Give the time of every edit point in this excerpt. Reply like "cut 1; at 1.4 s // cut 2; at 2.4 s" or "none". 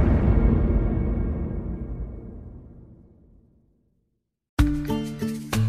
cut 1; at 4.4 s